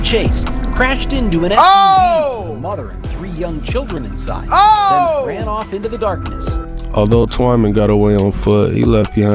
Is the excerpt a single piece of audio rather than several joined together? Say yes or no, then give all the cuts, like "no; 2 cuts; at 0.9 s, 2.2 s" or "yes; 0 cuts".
yes; 0 cuts